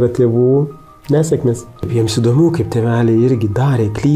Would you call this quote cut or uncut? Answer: cut